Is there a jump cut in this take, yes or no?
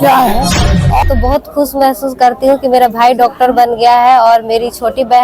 yes